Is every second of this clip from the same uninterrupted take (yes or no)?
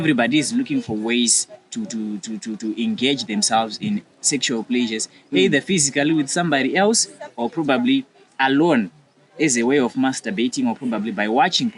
yes